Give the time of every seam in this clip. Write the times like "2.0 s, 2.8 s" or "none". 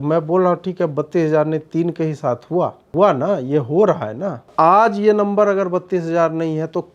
2.9 s, 4.5 s